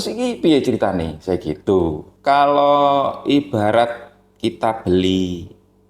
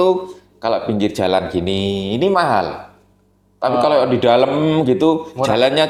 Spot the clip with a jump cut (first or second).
first